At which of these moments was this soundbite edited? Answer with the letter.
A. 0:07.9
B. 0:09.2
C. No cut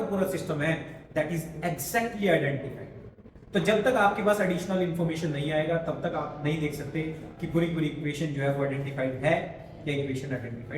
C